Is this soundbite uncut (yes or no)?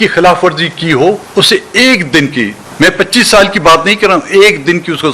yes